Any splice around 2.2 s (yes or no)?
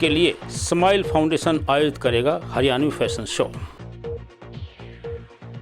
no